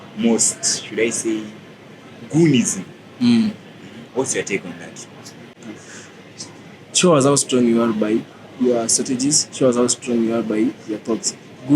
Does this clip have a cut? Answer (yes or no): yes